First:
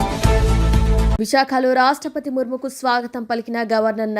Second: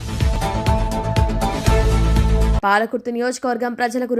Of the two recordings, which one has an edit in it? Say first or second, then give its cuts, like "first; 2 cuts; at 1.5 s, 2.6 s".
first; 1 cut; at 1.1 s